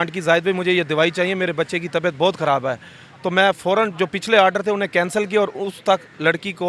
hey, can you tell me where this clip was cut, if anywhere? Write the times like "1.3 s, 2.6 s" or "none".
none